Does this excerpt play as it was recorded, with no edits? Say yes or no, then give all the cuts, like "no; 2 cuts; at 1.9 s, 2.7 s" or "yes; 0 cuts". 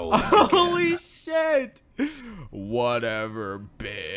yes; 0 cuts